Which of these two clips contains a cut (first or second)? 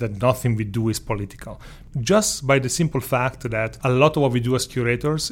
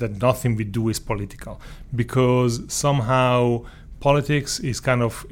first